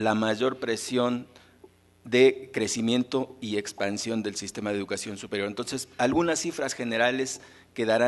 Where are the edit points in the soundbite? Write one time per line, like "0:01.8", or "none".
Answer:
0:01.2